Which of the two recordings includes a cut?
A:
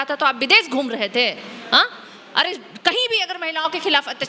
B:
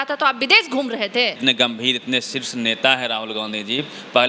B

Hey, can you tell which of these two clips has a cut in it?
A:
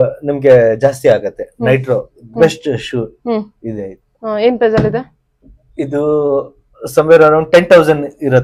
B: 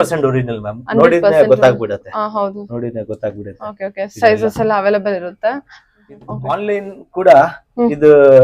B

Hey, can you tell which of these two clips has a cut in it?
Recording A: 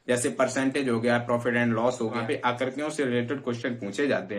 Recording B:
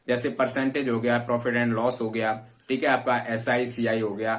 A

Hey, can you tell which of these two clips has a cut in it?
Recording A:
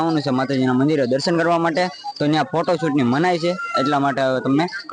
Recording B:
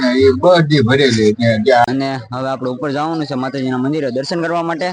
B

